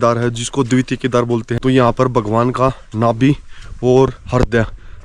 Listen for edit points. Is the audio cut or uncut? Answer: cut